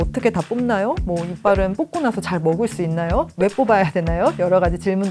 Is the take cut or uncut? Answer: uncut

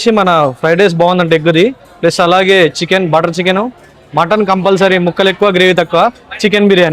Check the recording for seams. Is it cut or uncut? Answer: uncut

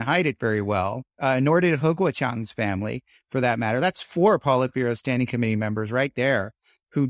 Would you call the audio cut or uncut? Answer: uncut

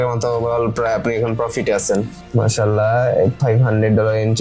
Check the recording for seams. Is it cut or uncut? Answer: cut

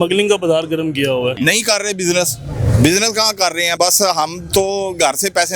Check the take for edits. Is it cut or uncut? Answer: cut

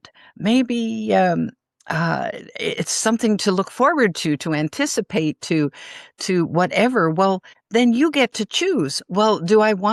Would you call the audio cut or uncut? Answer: uncut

